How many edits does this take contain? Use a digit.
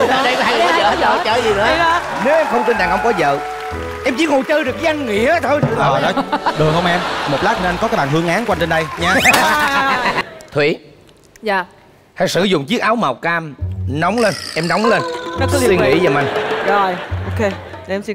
1